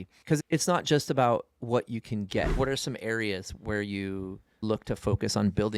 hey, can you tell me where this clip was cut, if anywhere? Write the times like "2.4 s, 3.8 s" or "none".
2.6 s, 4.6 s